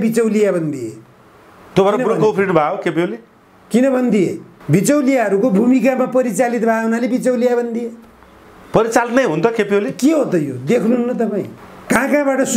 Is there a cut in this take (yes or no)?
no